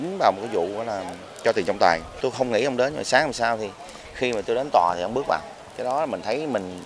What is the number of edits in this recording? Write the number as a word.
two